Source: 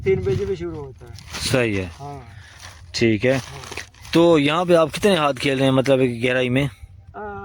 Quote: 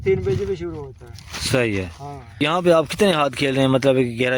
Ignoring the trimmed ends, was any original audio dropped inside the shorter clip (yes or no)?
yes